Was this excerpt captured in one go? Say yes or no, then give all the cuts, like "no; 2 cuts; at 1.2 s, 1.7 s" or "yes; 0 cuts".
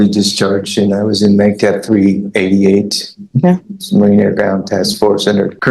no; 1 cut; at 3.7 s